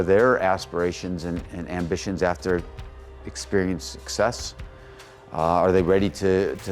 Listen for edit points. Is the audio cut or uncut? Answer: uncut